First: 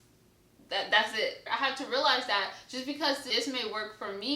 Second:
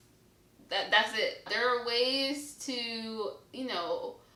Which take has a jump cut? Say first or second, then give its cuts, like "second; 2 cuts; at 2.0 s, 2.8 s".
first; 1 cut; at 1.4 s